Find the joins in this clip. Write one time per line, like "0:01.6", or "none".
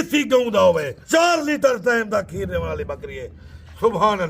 0:00.9